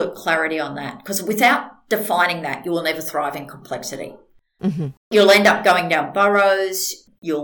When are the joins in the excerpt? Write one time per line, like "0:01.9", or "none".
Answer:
none